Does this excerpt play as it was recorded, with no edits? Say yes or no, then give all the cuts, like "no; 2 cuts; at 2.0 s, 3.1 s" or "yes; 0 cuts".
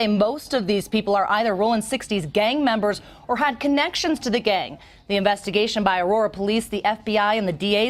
yes; 0 cuts